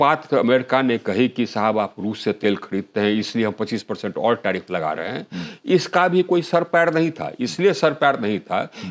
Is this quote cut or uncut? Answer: uncut